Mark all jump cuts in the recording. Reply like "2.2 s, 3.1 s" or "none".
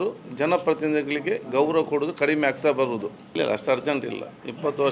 3.4 s